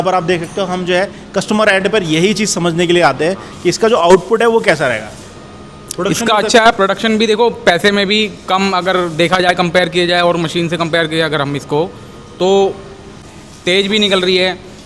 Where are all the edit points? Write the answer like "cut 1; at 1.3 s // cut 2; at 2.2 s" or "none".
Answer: cut 1; at 13.2 s